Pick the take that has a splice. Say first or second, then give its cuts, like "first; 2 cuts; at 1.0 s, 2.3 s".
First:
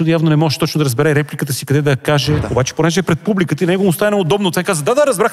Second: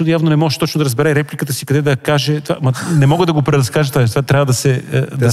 first; 1 cut; at 2.4 s